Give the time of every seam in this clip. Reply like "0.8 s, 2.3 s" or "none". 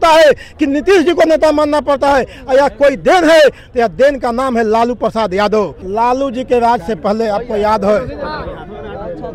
5.8 s